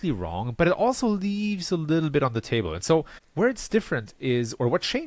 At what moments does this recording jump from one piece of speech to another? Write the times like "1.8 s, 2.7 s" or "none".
3.2 s